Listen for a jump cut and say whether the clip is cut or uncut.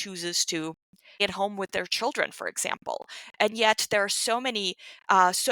cut